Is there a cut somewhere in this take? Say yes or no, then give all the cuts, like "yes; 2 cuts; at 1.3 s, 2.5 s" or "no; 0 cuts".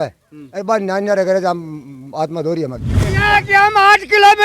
yes; 1 cut; at 3.1 s